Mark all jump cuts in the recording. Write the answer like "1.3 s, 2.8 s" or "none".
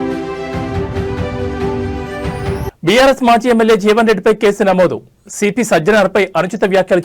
2.3 s